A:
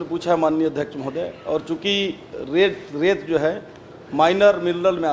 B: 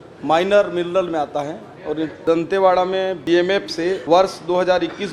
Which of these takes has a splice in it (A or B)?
B